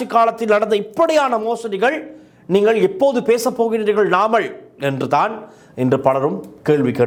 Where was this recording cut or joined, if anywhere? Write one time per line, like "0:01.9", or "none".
none